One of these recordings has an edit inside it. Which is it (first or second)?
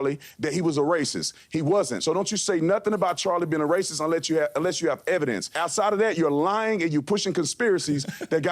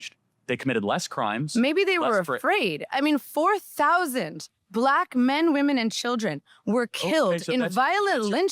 first